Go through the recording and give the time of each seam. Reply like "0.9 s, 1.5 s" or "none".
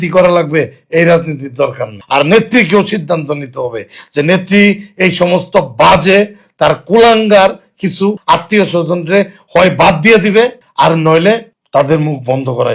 1.9 s, 8.2 s, 10.6 s, 11.5 s